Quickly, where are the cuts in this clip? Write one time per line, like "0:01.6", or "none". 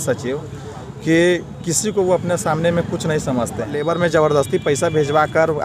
0:03.8